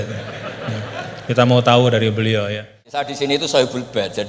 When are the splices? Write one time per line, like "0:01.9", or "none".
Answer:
0:02.8